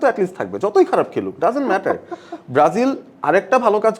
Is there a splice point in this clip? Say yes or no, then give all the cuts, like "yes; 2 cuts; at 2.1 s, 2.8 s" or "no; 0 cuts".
no; 0 cuts